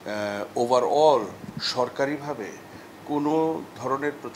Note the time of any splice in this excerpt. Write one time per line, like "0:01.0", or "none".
none